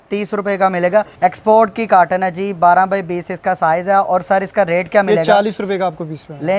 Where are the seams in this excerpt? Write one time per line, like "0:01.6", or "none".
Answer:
0:01.1